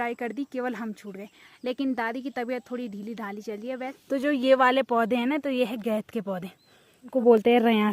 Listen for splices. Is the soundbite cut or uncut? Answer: cut